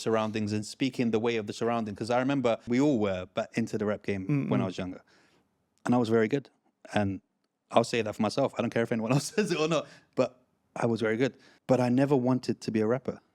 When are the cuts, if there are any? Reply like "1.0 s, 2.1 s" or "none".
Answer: 2.7 s, 11.5 s